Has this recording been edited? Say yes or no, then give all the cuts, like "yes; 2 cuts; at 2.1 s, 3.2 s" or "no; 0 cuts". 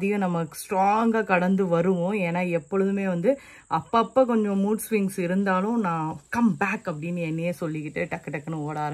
no; 0 cuts